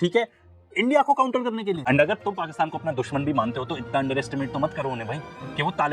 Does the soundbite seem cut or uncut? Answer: cut